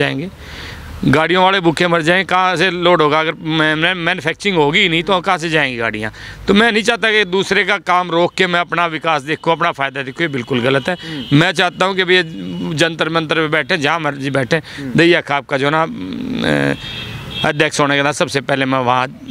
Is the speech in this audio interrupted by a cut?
no; 0 cuts

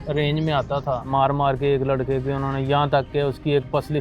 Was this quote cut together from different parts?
yes; 1 cut; at 1.1 s

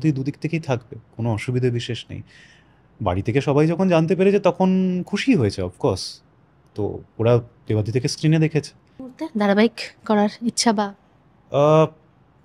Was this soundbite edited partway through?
yes; 1 cut; at 9.2 s

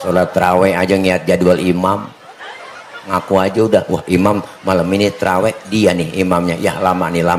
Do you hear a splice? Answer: no; 0 cuts

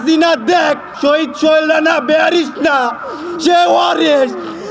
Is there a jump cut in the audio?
yes; 1 cut; at 0.9 s

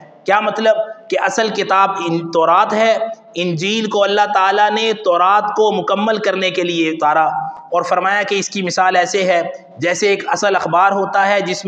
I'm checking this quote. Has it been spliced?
no; 0 cuts

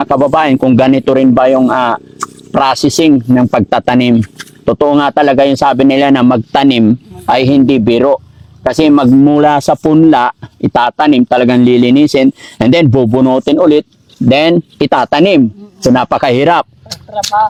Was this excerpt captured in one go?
yes; 0 cuts

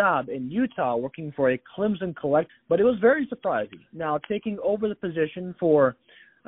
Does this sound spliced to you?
yes; 1 cut; at 2.5 s

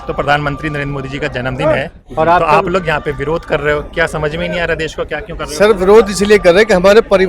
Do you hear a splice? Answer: no; 0 cuts

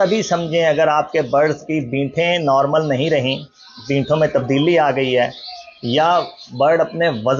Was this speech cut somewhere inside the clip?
no; 0 cuts

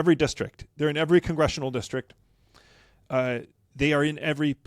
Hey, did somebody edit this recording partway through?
no; 0 cuts

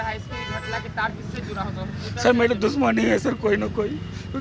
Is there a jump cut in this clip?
no; 0 cuts

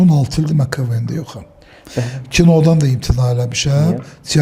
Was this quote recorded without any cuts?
yes; 0 cuts

